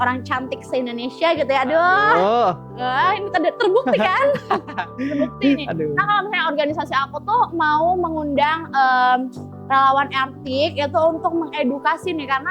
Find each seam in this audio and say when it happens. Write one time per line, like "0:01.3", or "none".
none